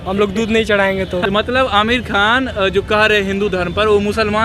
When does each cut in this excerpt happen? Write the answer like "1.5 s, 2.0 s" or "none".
1.2 s